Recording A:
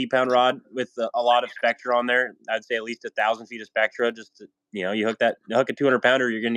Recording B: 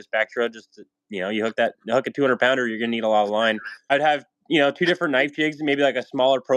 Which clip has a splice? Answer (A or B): B